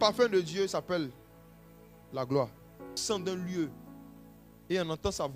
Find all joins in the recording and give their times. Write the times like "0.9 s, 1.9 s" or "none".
3.0 s